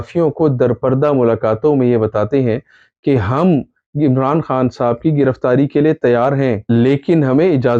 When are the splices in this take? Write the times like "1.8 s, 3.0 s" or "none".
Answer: none